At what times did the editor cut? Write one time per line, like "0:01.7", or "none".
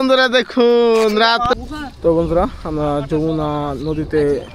0:01.5